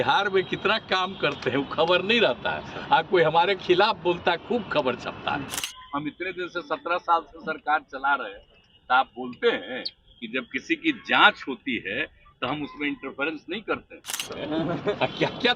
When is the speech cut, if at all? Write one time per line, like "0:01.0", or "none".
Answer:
0:05.6
0:14.2